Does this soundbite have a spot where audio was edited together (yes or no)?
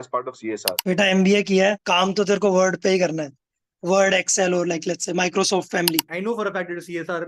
yes